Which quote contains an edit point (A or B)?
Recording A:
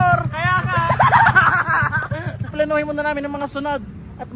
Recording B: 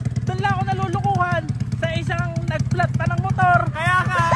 A